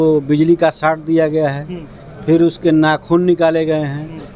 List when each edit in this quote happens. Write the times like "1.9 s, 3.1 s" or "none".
none